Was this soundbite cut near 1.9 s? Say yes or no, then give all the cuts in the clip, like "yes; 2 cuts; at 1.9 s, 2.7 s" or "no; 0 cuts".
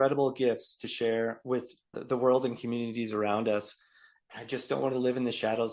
yes; 1 cut; at 1.9 s